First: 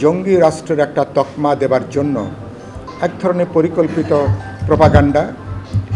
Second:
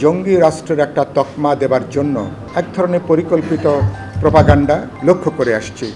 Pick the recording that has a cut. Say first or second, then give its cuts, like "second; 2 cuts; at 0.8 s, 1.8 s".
second; 2 cuts; at 2.4 s, 4.9 s